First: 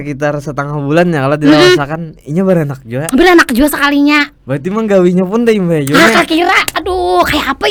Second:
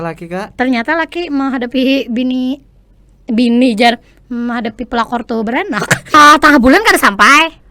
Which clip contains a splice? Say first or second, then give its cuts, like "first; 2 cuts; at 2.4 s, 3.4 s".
second; 1 cut; at 6.1 s